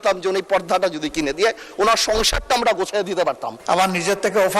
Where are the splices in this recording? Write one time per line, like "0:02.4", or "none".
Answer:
0:03.5